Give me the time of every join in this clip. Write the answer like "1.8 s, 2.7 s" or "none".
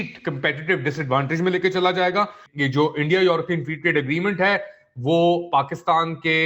2.4 s